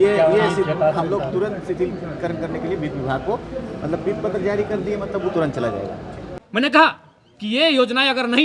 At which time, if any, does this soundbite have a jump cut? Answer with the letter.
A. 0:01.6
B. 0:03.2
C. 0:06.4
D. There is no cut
C